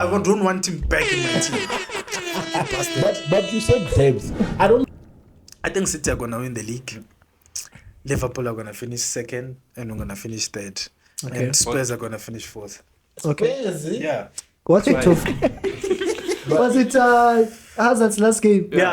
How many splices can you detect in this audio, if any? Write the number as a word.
two